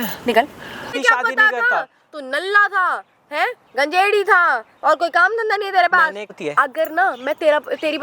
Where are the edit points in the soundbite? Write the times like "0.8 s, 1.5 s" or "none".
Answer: 0.9 s, 6.4 s